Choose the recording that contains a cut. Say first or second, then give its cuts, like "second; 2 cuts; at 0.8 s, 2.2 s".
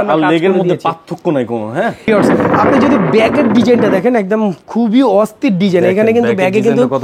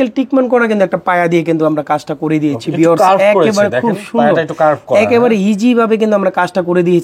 first; 1 cut; at 2.1 s